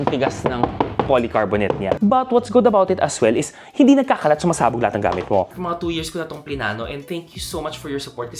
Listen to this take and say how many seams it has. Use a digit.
2